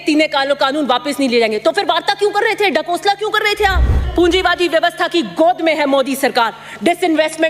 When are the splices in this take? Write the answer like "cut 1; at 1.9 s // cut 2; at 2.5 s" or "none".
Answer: cut 1; at 4.1 s